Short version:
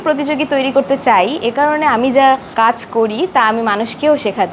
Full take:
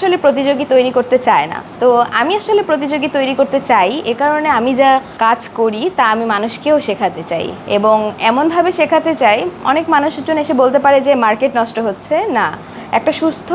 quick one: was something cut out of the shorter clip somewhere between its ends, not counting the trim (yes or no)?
no